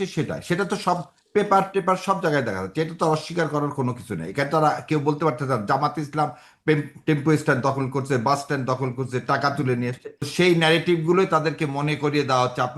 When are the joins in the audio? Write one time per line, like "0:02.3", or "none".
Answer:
0:10.3